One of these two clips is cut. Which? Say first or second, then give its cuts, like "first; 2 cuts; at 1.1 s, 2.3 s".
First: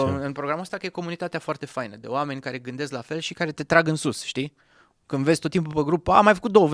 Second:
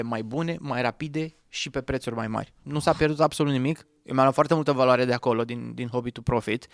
second; 1 cut; at 2.6 s